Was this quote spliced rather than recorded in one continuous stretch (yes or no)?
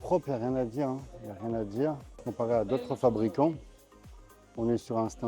yes